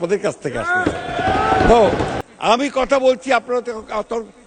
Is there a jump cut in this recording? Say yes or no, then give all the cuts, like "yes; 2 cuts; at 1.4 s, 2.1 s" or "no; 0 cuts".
yes; 1 cut; at 2.1 s